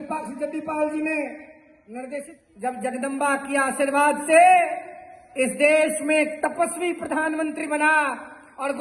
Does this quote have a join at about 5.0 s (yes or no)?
no